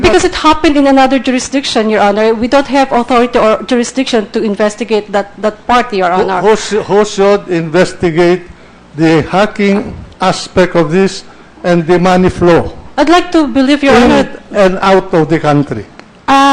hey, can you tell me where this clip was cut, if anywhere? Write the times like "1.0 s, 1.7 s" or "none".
none